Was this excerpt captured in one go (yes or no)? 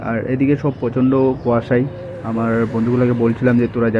yes